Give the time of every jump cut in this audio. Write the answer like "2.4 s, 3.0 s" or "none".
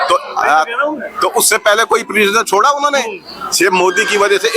none